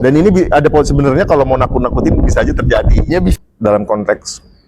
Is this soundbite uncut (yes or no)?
no